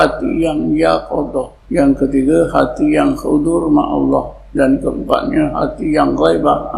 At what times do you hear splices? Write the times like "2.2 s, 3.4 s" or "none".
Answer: 1.6 s, 4.4 s